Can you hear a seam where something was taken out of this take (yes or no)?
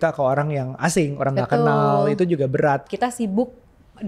yes